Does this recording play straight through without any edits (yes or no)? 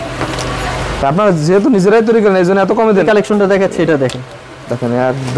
no